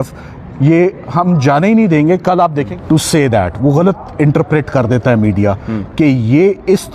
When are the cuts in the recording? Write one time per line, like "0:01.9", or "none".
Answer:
0:02.7